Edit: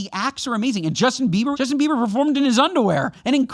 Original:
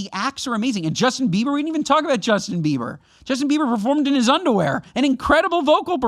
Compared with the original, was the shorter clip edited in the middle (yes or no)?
yes